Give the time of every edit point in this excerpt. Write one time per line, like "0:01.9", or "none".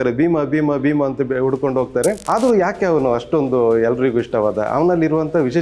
0:02.2